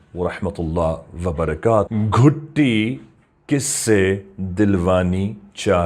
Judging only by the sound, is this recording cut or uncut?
cut